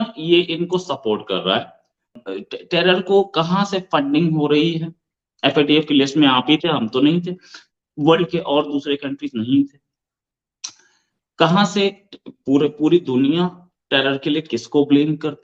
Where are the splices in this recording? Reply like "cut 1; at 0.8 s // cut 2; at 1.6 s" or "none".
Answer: cut 1; at 2.2 s